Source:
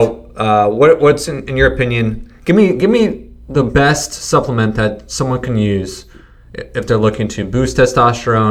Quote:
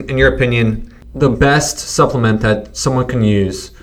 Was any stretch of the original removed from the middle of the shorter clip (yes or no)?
yes